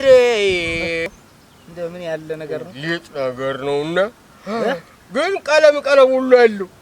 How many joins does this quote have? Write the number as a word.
one